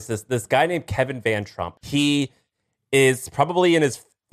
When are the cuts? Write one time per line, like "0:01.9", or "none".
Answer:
0:01.6